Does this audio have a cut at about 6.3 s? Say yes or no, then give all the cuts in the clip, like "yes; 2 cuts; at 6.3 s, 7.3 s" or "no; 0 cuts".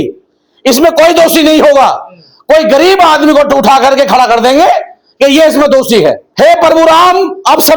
yes; 1 cut; at 6.3 s